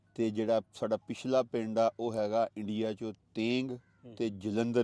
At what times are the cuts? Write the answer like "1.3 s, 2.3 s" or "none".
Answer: none